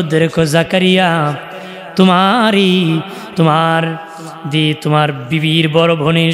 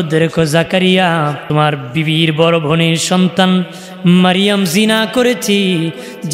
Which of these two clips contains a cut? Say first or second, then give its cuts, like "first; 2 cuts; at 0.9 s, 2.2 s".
second; 1 cut; at 1.4 s